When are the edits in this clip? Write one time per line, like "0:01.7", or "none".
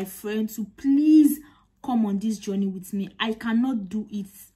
none